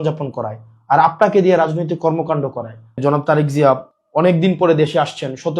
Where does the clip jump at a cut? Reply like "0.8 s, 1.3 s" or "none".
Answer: 3.0 s, 4.0 s